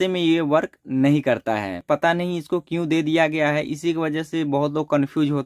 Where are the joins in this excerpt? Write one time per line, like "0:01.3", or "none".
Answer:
0:01.8